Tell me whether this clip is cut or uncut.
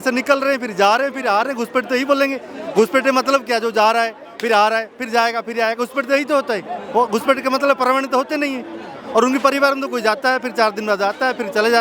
uncut